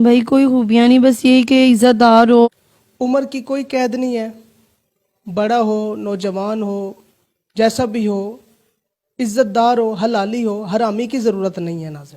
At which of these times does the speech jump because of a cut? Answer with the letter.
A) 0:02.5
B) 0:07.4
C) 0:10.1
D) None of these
A